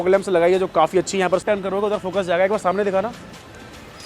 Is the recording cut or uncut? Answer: cut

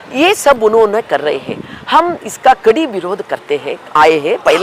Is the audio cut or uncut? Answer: uncut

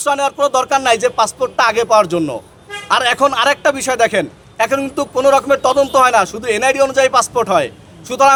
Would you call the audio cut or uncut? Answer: uncut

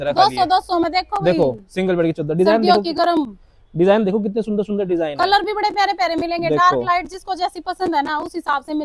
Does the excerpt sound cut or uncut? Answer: uncut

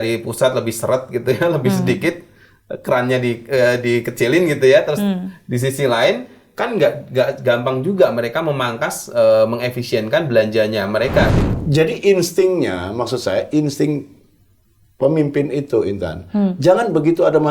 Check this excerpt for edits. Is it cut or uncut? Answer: cut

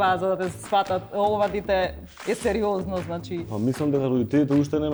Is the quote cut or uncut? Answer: uncut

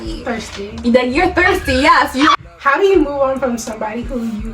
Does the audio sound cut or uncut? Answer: cut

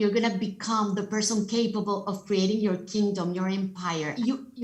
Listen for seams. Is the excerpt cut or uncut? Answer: uncut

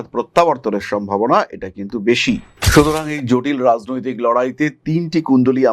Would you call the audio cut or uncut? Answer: cut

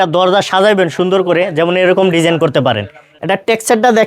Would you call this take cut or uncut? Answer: cut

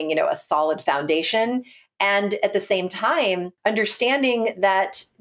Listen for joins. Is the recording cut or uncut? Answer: uncut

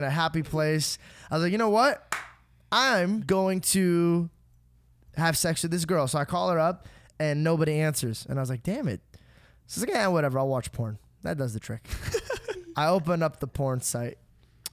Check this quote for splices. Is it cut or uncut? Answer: cut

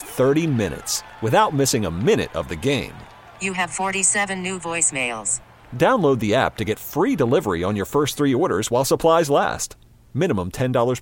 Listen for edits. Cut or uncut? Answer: uncut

